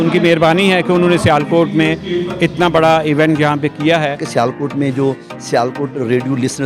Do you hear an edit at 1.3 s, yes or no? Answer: no